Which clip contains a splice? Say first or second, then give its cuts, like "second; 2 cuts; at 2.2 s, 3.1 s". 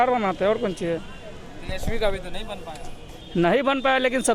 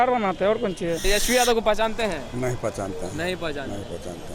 second; 1 cut; at 1.0 s